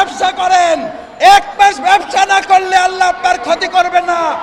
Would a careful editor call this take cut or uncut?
uncut